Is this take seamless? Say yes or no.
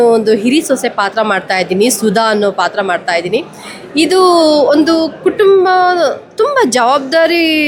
yes